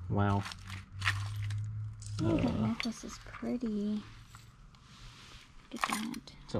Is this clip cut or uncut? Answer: uncut